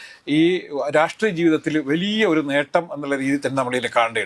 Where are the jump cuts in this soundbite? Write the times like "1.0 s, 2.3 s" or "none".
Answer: none

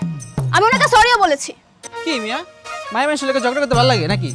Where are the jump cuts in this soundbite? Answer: 1.7 s

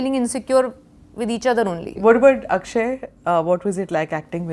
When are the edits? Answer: 1.9 s

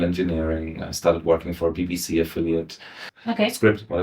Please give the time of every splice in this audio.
3.1 s

